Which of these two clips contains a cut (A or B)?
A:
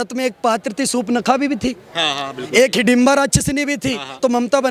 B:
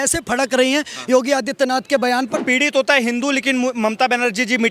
B